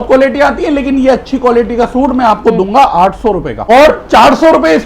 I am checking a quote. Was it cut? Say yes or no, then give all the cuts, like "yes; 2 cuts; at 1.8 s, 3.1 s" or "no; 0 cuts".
yes; 1 cut; at 3.6 s